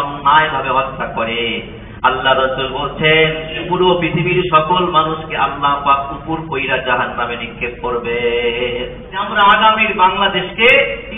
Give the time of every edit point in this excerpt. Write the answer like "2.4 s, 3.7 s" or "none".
9.3 s